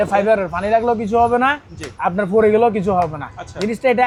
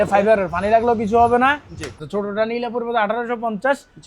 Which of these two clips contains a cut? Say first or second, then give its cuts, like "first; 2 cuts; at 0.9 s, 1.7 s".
second; 1 cut; at 2.0 s